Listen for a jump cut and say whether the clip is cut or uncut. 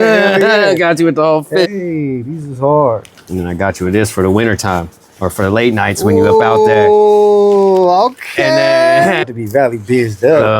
cut